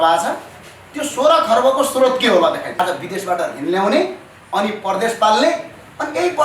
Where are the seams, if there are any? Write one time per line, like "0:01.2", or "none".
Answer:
0:02.8